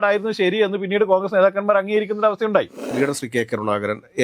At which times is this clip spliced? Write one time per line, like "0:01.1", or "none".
0:02.9